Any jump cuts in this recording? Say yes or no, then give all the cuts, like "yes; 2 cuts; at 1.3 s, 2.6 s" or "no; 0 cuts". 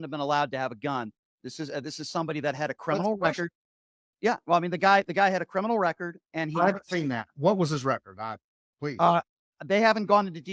no; 0 cuts